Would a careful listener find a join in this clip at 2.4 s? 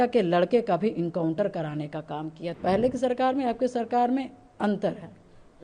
yes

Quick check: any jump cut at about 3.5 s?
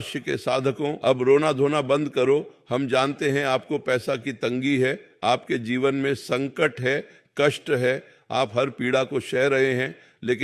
no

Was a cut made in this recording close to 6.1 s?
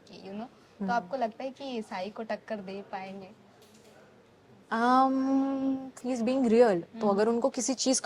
yes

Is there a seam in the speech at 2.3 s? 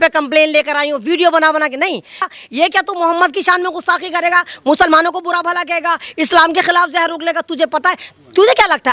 yes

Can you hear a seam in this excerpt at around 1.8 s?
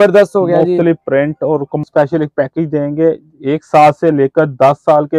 yes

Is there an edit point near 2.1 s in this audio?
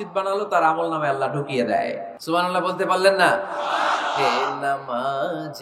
yes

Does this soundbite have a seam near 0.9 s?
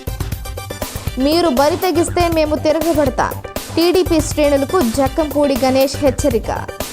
no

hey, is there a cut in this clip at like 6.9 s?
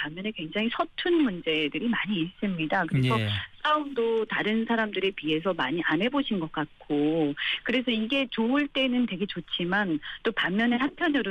no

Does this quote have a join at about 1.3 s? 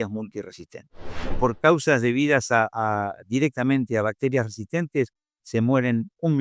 yes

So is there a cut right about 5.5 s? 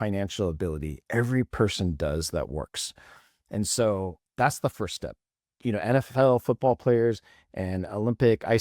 yes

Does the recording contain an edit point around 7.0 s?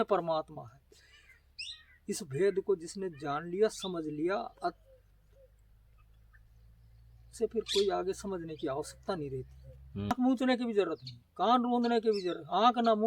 no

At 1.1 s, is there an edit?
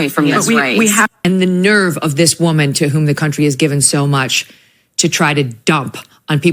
yes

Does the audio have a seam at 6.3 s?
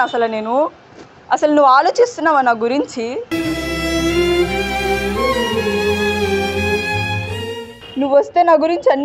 no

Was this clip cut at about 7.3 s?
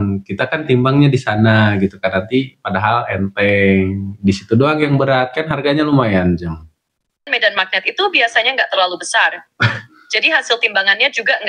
yes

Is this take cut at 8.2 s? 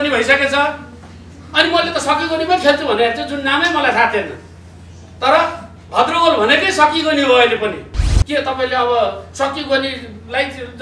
yes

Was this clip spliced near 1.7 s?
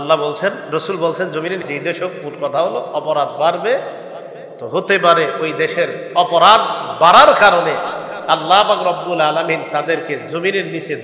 yes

